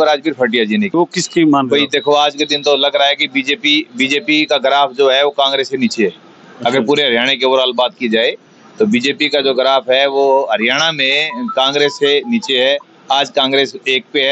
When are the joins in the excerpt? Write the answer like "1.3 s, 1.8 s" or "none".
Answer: 0.9 s